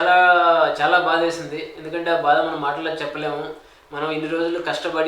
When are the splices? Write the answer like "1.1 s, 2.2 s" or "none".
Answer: none